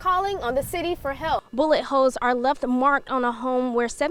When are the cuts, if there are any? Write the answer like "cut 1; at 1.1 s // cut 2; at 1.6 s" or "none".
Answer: cut 1; at 1.5 s